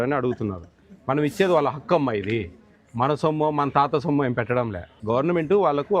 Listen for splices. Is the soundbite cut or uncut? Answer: cut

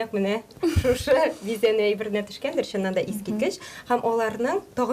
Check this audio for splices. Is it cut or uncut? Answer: uncut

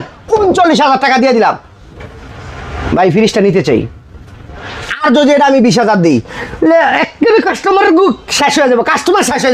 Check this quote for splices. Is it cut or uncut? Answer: uncut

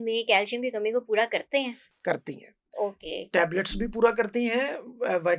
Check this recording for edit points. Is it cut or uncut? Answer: uncut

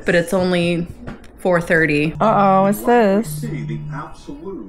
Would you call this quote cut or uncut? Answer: cut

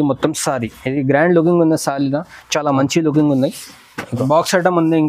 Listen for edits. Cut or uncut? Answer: cut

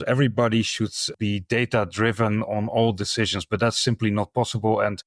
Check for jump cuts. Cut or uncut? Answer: cut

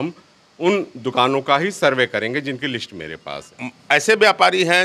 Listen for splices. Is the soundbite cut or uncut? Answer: cut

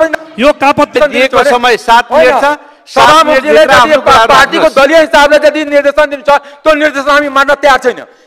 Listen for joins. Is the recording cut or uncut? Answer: cut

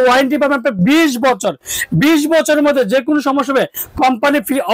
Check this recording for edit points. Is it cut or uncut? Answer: uncut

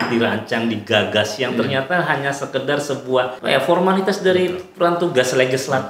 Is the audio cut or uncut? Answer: cut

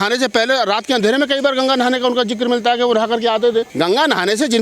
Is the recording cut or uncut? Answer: cut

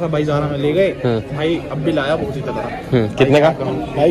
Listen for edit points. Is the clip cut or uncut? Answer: uncut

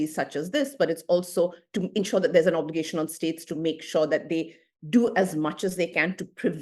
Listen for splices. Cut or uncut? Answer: uncut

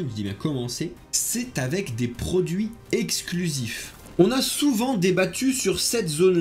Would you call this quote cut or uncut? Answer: cut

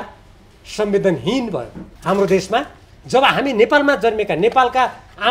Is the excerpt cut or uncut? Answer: cut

